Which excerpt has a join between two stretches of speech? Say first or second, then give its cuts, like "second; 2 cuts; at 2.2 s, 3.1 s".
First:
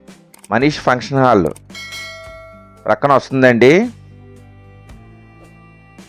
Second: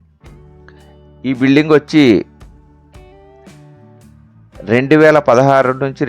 second; 3 cuts; at 0.7 s, 2.3 s, 3.9 s